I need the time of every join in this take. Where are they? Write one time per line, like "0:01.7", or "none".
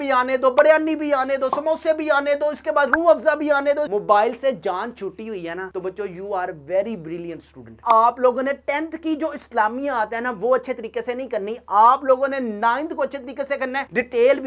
0:03.9
0:07.8